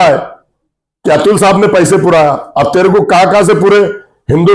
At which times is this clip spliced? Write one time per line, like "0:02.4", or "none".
none